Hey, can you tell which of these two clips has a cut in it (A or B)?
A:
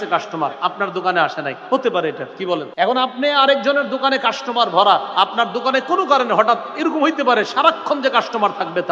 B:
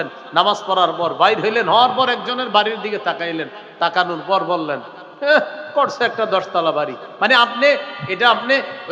A